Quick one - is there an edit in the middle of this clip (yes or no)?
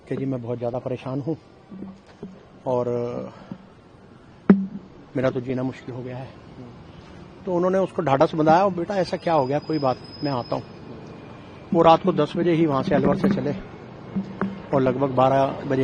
no